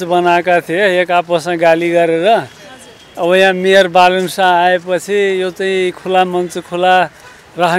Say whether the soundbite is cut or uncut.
uncut